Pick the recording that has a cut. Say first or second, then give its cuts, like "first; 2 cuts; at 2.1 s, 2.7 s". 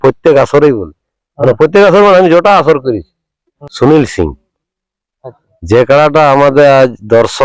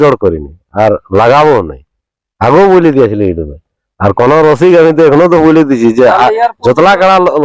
first; 1 cut; at 3.6 s